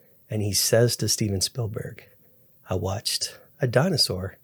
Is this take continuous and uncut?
yes; 0 cuts

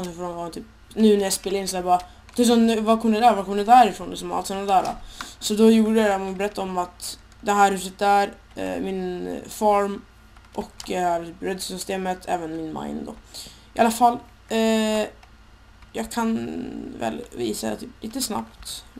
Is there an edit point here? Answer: no; 0 cuts

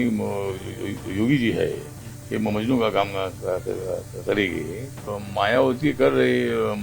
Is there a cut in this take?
yes; 1 cut; at 5.1 s

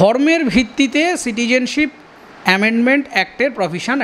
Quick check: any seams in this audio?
no; 0 cuts

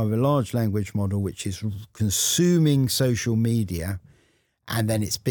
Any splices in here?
no; 0 cuts

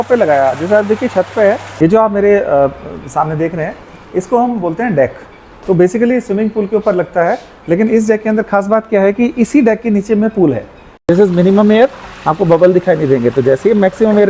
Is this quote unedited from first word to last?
no; 2 cuts; at 1.7 s, 11.0 s

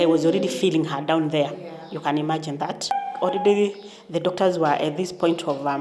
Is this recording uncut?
no; 1 cut; at 2.9 s

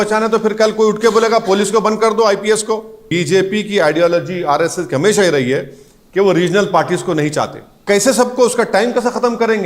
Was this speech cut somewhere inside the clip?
yes; 2 cuts; at 3.1 s, 7.8 s

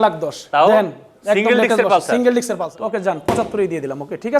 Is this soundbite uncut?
no; 1 cut; at 2.7 s

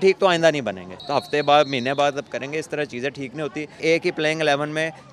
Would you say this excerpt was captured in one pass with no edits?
no; 2 cuts; at 1.0 s, 3.8 s

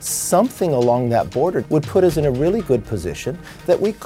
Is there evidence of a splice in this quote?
yes; 1 cut; at 1.7 s

